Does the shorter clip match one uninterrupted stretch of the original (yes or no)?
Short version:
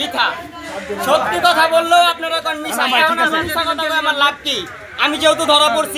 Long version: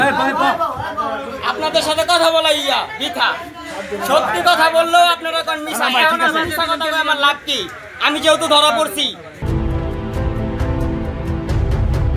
yes